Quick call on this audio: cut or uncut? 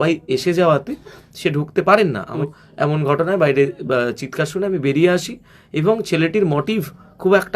cut